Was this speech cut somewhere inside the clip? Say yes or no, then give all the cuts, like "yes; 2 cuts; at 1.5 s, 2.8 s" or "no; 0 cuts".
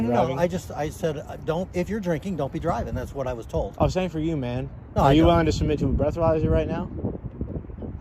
no; 0 cuts